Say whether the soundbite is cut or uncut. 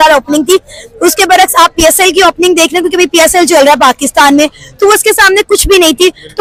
uncut